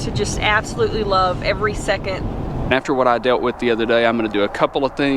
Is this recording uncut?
no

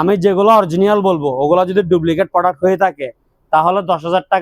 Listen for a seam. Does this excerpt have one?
no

